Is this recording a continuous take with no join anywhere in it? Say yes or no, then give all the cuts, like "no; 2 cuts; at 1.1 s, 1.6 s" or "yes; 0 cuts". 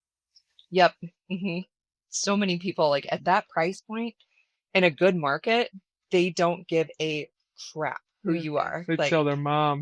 yes; 0 cuts